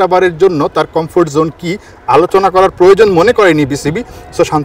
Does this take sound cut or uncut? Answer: uncut